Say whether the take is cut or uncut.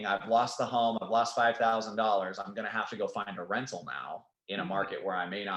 uncut